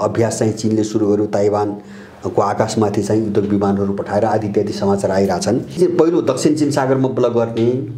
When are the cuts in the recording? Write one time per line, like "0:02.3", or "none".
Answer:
0:05.8

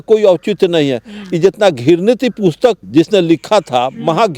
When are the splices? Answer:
0:02.8

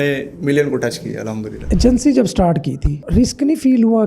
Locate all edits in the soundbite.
0:01.5
0:02.9

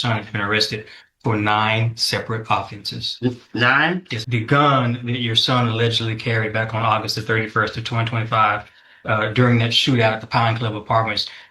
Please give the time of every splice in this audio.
0:04.2

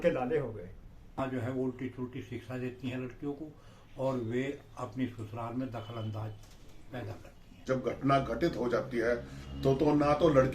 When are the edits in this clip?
0:01.2
0:07.6

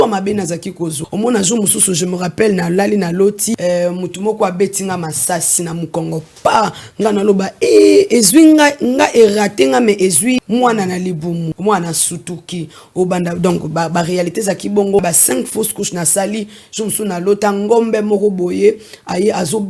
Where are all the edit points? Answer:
0:01.0
0:03.6
0:05.6
0:10.4
0:11.5
0:15.0

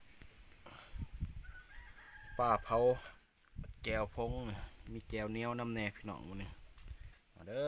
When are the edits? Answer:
none

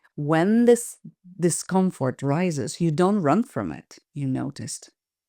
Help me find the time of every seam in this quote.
none

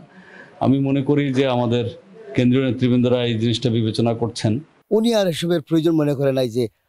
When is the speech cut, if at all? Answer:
0:04.7

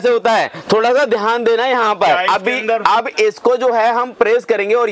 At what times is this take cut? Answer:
0:02.2

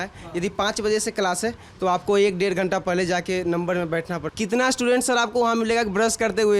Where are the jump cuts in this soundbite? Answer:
0:04.2

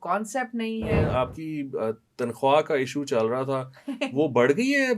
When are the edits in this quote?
0:00.9

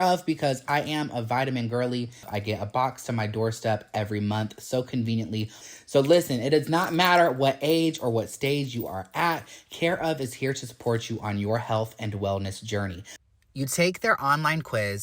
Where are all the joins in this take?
0:02.3
0:05.6

